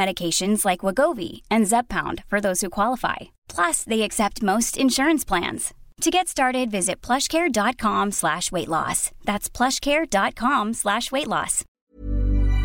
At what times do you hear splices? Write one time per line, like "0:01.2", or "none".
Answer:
0:11.7